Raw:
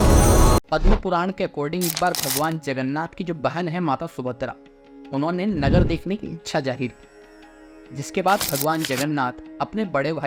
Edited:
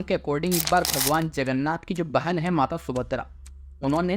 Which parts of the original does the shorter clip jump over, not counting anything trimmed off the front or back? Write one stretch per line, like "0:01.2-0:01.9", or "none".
none